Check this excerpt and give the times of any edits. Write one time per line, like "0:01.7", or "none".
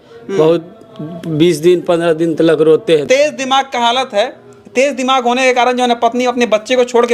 0:03.0